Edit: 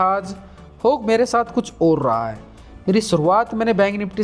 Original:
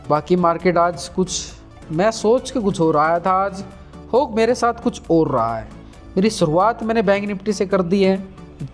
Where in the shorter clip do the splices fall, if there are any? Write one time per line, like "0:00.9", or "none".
none